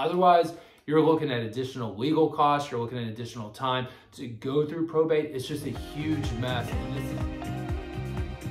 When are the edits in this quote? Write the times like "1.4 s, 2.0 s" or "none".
6.7 s